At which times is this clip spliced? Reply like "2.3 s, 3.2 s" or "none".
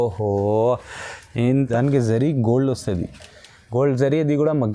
1.6 s